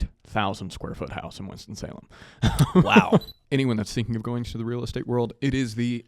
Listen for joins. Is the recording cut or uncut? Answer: cut